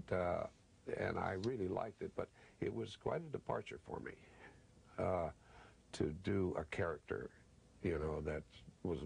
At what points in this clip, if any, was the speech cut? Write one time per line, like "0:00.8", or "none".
none